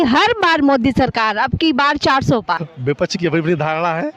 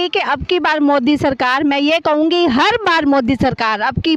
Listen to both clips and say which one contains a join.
first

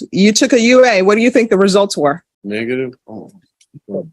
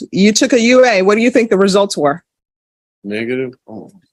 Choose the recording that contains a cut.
first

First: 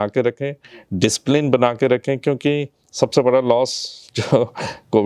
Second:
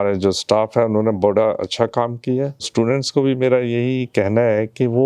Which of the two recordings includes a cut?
second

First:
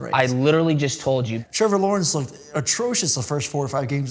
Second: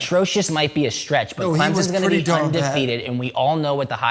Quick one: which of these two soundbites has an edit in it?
first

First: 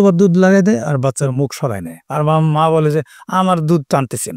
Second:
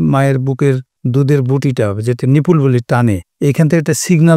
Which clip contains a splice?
second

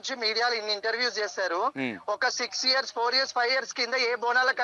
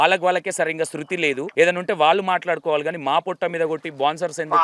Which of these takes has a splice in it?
second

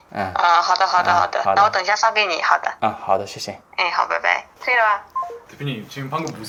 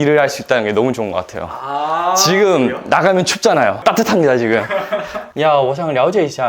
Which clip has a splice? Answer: second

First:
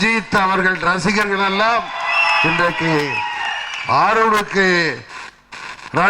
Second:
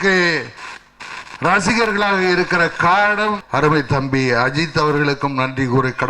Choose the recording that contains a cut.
second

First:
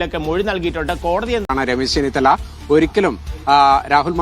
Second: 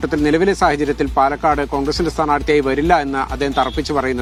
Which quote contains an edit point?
first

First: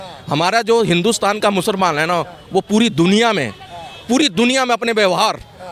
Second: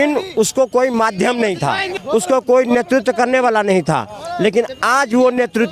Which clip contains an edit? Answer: second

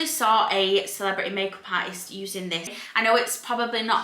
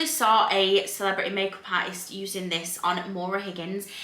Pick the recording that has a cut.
first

